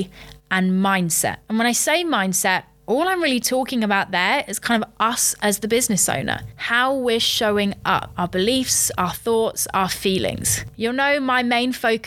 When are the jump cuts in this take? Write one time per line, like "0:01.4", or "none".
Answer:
none